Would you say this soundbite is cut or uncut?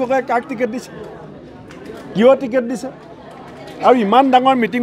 uncut